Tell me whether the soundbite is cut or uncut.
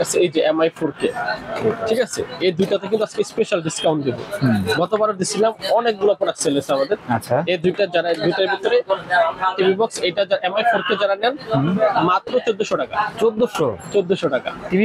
uncut